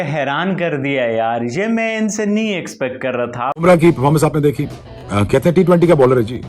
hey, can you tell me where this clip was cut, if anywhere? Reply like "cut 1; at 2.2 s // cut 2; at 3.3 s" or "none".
cut 1; at 3.6 s